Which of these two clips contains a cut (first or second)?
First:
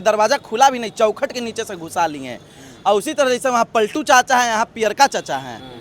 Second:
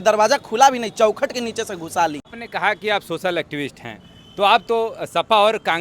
second